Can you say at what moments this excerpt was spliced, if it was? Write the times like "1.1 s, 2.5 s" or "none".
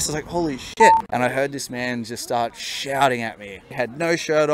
1.1 s, 3.6 s